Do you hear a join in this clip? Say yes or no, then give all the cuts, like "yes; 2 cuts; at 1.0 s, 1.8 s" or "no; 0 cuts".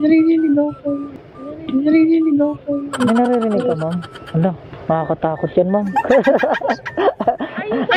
no; 0 cuts